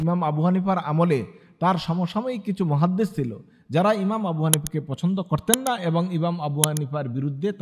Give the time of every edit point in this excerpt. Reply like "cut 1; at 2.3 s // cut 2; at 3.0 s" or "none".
none

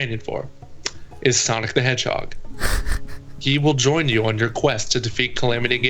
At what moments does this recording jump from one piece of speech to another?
none

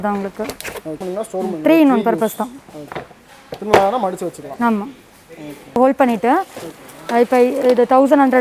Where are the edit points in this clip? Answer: cut 1; at 1.0 s // cut 2; at 5.8 s

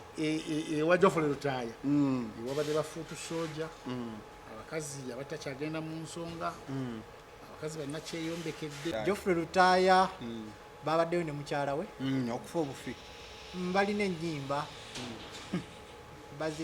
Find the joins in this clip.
cut 1; at 8.9 s

